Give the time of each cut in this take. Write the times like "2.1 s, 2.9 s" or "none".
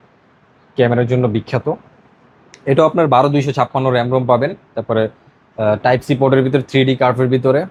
none